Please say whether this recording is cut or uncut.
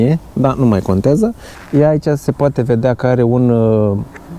uncut